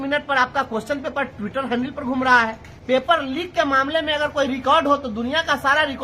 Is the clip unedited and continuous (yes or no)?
no